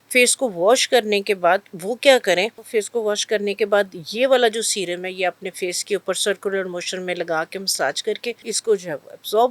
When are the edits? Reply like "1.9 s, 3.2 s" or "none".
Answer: 2.6 s, 8.5 s